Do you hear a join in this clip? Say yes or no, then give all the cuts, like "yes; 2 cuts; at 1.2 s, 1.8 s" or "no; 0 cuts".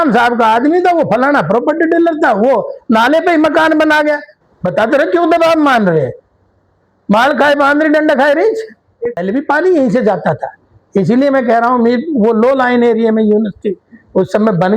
yes; 2 cuts; at 4.3 s, 9.2 s